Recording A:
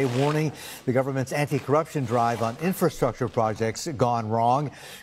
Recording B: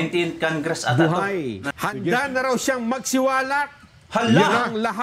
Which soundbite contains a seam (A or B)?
B